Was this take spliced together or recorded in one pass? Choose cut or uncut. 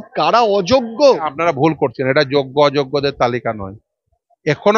cut